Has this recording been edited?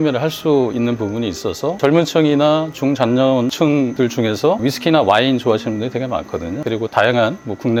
no; 0 cuts

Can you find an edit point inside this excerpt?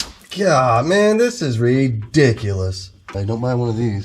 yes; 1 cut; at 3.1 s

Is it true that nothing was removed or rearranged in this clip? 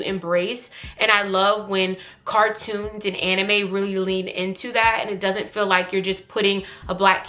yes; 0 cuts

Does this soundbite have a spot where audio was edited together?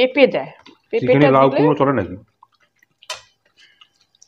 no; 0 cuts

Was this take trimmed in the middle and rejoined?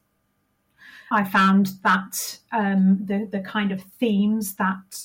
yes; 1 cut; at 1.1 s

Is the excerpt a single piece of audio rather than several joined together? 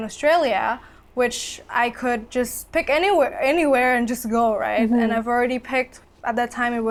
yes; 0 cuts

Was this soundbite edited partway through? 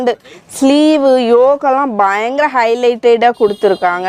no; 0 cuts

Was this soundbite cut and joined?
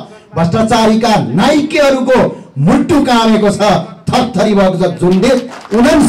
no; 0 cuts

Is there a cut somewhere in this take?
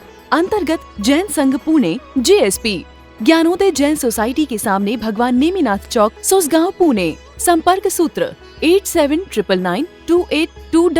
no; 0 cuts

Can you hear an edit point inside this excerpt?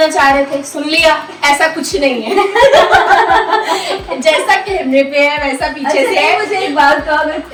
no; 0 cuts

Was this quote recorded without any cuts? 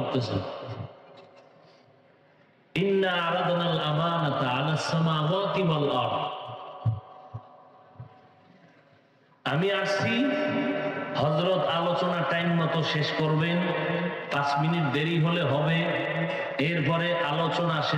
yes; 0 cuts

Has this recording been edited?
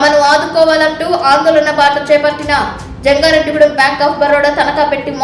no; 0 cuts

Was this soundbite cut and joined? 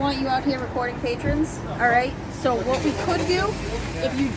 no; 0 cuts

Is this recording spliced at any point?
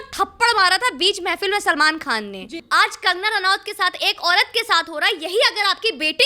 yes; 1 cut; at 2.6 s

